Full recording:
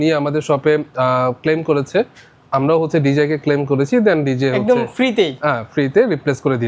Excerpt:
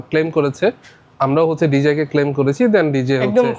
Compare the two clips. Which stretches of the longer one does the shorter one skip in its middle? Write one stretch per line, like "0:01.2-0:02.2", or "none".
none